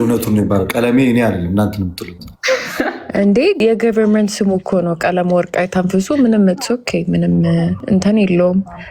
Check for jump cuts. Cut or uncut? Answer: cut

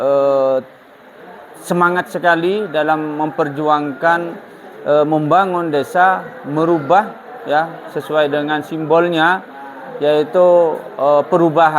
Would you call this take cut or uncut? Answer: uncut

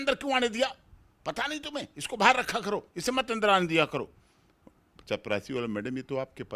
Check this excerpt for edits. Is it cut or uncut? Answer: uncut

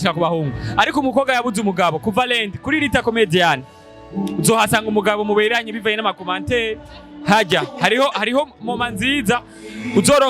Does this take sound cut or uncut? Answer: uncut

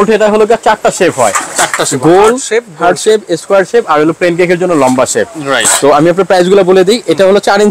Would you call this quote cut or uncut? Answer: uncut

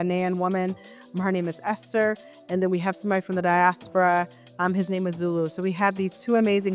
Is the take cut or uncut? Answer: uncut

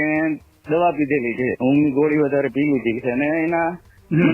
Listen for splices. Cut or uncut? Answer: cut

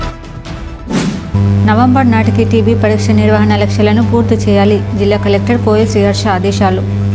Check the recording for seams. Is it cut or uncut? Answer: cut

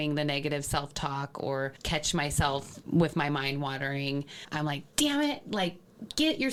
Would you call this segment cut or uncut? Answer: uncut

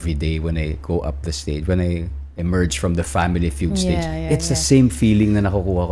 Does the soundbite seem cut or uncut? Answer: uncut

